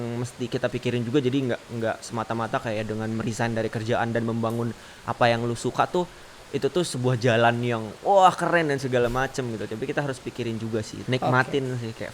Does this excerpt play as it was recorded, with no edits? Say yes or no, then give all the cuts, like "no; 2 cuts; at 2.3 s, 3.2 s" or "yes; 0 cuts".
no; 1 cut; at 10.9 s